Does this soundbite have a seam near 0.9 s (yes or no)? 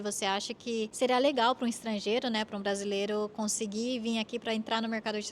yes